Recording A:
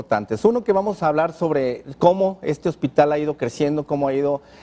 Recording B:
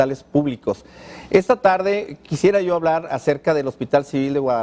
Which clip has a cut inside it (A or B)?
B